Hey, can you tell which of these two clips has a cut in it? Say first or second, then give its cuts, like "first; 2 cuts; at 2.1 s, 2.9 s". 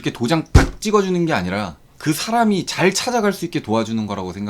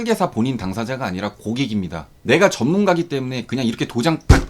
second; 1 cut; at 2.1 s